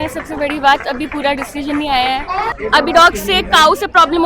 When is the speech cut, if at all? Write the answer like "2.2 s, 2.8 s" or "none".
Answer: 2.5 s